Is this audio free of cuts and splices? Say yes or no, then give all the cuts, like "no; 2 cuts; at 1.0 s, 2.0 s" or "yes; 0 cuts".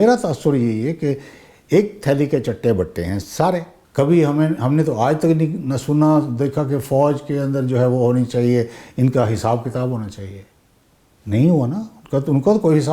no; 1 cut; at 3.8 s